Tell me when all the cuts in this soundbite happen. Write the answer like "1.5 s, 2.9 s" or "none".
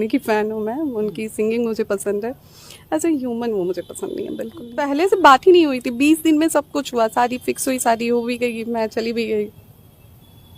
4.8 s